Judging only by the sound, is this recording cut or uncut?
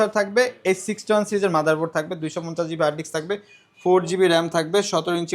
uncut